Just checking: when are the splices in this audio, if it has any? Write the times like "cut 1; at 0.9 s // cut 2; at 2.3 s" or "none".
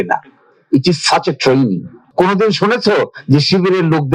cut 1; at 2.0 s